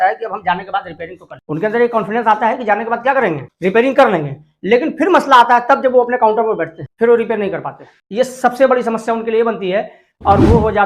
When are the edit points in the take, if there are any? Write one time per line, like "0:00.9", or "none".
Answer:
none